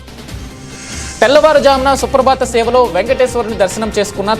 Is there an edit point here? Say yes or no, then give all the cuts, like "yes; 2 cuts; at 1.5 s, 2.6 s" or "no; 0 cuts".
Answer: yes; 1 cut; at 1.2 s